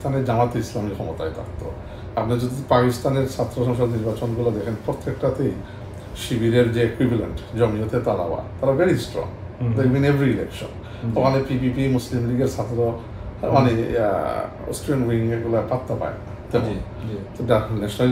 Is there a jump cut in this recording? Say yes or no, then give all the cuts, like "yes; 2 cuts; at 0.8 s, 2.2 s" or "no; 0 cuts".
no; 0 cuts